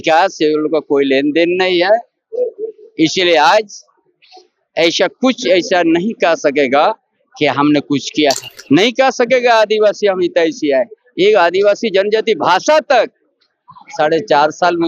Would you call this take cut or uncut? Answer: cut